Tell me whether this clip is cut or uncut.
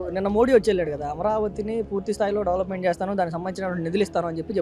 uncut